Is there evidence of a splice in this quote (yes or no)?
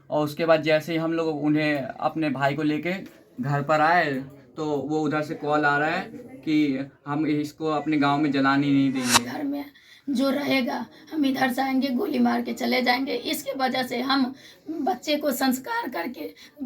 yes